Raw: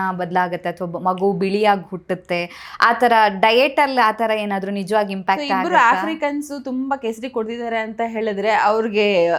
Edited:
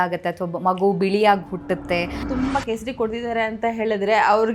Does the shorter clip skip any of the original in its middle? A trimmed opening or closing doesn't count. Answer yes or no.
yes